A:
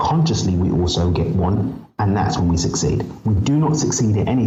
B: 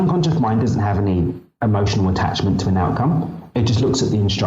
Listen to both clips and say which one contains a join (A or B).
B